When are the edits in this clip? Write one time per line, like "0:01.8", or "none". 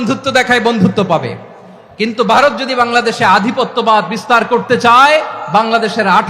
none